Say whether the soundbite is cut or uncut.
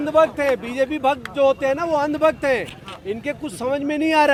uncut